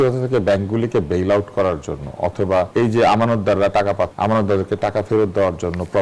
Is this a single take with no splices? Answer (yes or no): no